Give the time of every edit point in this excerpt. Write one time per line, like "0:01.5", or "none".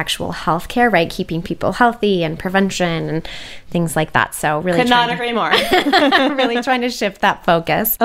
none